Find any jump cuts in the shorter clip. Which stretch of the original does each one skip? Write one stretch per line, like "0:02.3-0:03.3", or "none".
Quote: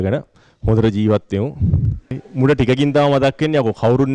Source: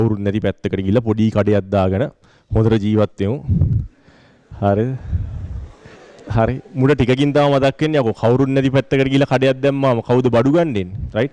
0:04.1-0:06.6